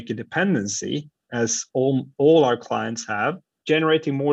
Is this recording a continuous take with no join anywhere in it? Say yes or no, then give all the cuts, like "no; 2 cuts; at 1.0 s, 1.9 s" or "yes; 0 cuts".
yes; 0 cuts